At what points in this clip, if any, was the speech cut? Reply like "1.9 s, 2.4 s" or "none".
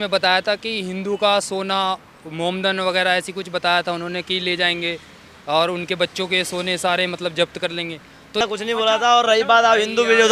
8.4 s